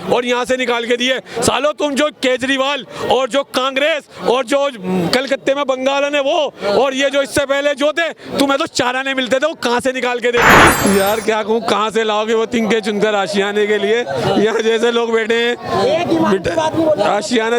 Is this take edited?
yes; 1 cut; at 10.8 s

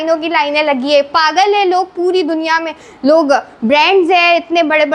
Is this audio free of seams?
yes; 0 cuts

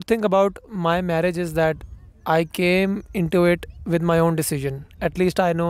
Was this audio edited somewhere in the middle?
no; 0 cuts

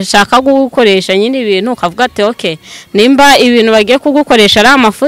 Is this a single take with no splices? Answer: yes; 0 cuts

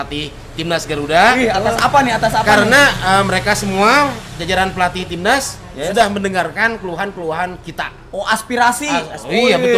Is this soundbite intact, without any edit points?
yes; 0 cuts

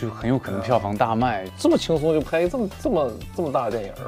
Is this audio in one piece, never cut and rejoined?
no; 1 cut; at 1.5 s

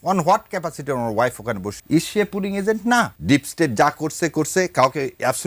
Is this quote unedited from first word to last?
no; 2 cuts; at 1.8 s, 3.1 s

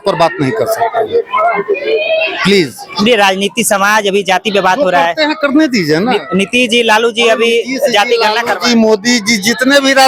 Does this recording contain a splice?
no; 0 cuts

